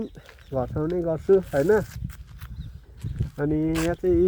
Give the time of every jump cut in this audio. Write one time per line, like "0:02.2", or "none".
none

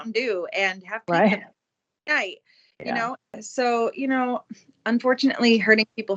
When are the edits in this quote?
0:03.4

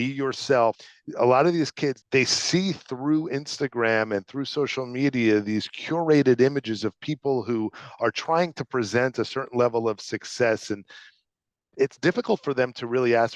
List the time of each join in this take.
0:00.8
0:02.0

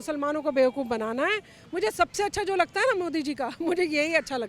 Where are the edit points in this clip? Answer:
0:01.5

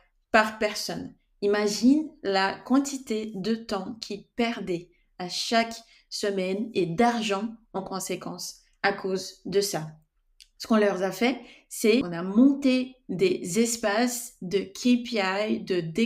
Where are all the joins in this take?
0:12.0

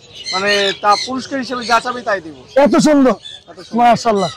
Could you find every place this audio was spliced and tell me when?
none

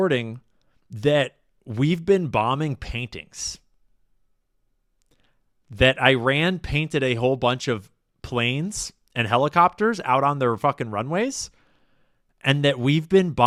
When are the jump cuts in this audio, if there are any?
none

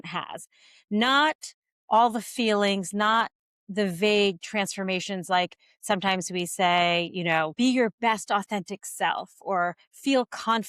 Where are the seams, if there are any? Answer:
0:07.5

